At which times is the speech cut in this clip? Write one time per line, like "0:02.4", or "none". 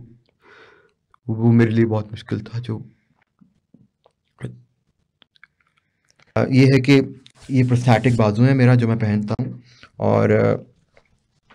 0:06.4

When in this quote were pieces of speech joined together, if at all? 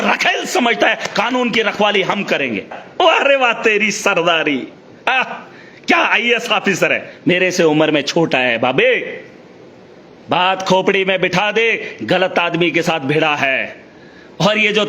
0:02.8

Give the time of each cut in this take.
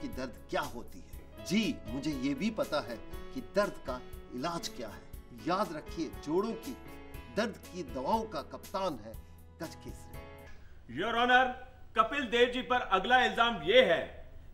none

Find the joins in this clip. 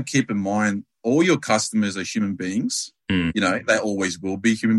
none

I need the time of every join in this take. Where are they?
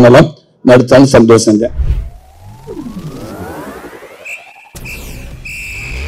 0:01.8

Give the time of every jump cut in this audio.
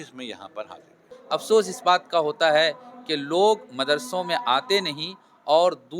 0:01.2

